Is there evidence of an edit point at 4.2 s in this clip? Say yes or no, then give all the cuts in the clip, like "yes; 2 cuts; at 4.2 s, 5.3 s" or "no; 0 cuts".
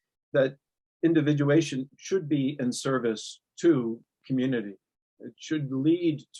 no; 1 cut; at 1.8 s